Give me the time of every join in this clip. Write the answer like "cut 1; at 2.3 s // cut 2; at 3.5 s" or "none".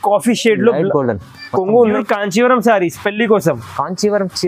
cut 1; at 2.0 s